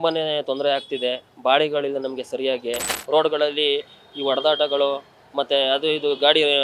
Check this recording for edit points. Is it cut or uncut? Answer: cut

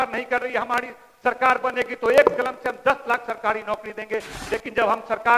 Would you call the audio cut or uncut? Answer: cut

